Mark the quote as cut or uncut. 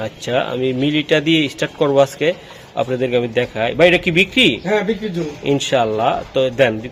uncut